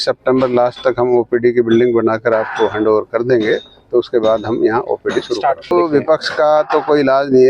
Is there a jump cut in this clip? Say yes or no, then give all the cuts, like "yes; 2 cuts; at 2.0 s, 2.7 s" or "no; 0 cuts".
yes; 1 cut; at 5.7 s